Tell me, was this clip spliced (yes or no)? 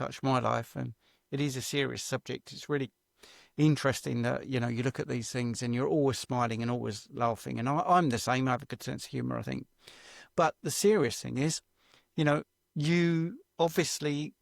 no